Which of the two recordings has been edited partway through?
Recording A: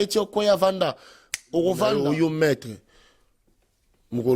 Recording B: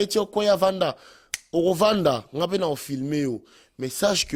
A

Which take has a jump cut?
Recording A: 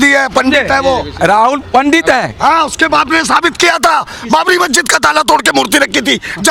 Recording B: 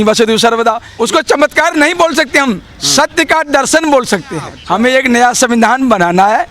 B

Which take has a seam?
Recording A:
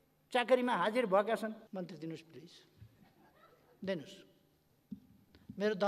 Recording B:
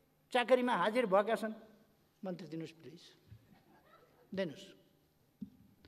A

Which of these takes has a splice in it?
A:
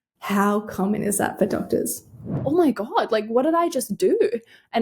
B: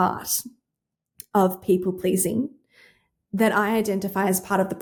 A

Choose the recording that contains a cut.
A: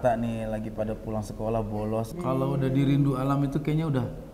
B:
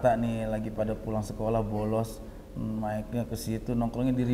A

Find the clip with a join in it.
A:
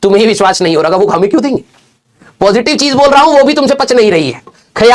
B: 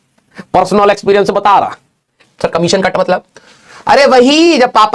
B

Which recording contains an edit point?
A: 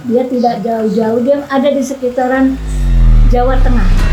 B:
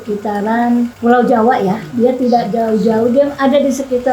B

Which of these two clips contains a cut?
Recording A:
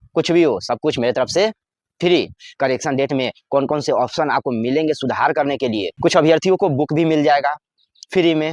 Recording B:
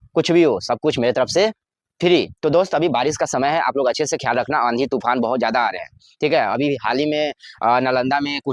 A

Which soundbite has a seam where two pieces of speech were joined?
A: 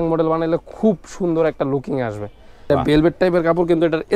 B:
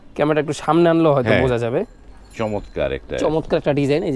A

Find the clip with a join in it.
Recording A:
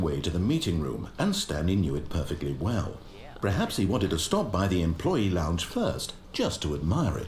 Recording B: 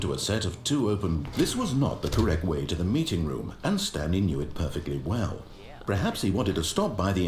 B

